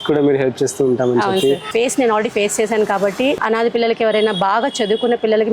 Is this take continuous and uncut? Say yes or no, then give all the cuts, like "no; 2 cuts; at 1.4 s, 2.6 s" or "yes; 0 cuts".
no; 2 cuts; at 1.7 s, 3.3 s